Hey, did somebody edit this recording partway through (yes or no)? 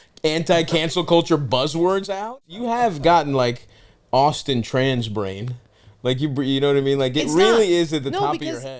yes